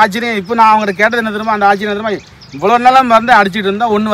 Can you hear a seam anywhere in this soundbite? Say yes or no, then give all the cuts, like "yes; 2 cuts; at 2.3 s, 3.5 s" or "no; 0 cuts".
no; 0 cuts